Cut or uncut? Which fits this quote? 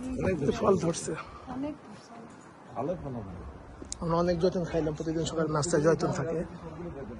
uncut